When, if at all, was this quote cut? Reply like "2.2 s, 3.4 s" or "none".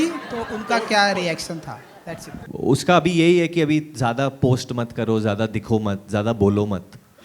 2.4 s